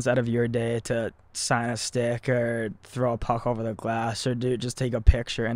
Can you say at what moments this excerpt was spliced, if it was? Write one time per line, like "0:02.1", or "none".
none

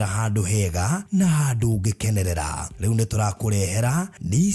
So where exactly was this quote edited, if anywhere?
0:03.6

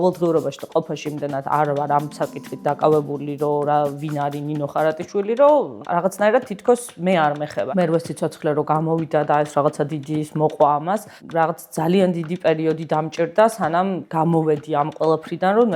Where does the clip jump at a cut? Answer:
0:05.8
0:07.6
0:14.0

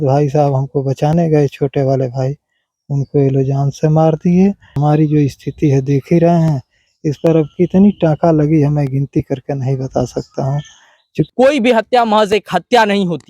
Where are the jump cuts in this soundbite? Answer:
0:04.7
0:11.3

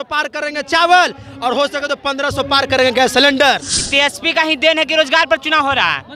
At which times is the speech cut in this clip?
0:03.7

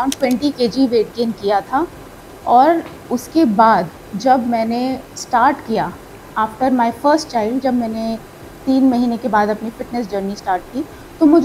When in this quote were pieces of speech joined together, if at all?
none

